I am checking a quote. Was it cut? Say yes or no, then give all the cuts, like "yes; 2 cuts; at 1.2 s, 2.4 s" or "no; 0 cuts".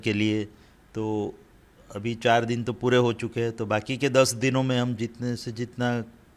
no; 0 cuts